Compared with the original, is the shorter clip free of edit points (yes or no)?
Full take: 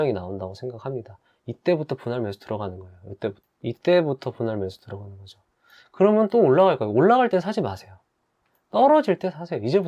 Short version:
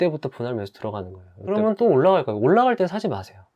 no